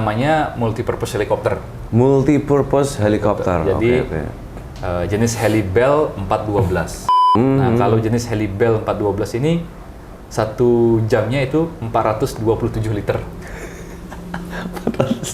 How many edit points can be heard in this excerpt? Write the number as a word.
one